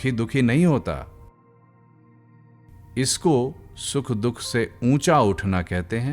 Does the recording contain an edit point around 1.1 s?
yes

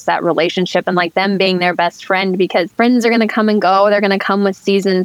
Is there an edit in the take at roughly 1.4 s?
no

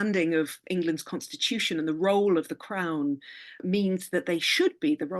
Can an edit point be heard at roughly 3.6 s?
yes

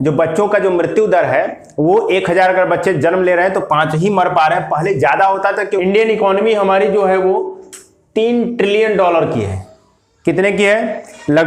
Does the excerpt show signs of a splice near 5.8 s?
yes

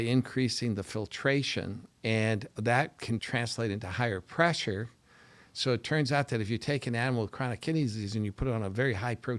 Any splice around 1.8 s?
yes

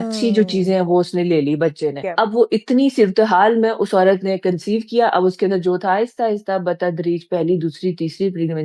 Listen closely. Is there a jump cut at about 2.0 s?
yes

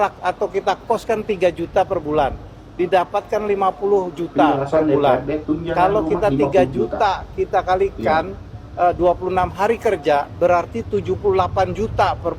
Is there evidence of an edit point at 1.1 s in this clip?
no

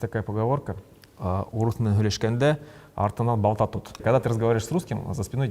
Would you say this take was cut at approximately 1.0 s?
no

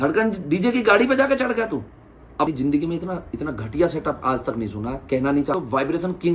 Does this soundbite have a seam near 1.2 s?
no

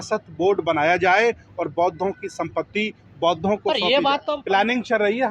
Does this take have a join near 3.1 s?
no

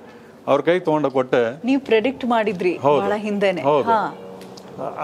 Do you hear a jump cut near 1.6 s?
no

